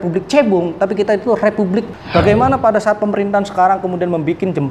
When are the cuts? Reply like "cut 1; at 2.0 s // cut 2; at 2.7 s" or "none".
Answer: cut 1; at 2.0 s